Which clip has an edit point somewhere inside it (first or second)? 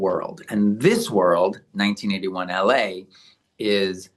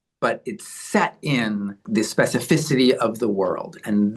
second